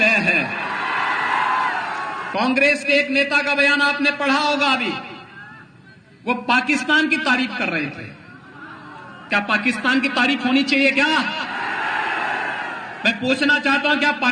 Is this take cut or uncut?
cut